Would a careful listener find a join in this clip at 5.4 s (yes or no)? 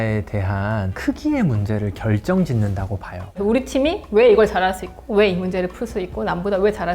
no